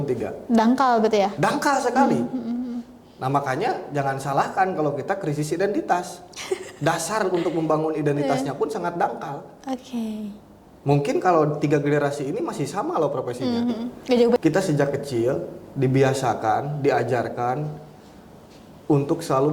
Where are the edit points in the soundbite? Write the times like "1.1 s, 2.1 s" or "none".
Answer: 14.4 s